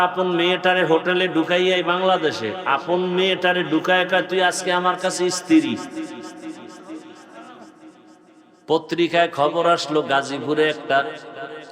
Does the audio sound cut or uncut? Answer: cut